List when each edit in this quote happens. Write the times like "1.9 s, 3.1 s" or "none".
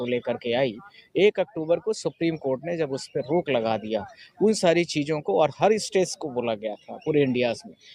none